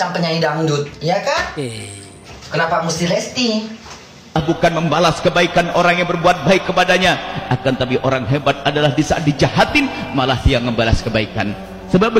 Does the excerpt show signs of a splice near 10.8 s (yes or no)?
no